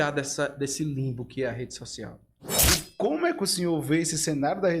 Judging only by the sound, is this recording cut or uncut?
cut